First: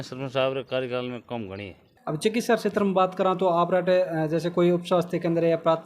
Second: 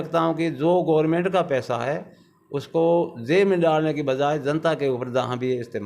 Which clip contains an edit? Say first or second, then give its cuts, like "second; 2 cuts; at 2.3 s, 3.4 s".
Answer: first; 1 cut; at 1.9 s